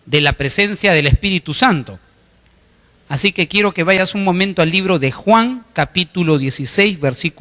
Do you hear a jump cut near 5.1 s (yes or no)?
no